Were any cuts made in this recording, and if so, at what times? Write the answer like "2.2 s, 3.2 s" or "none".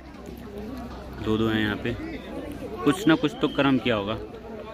none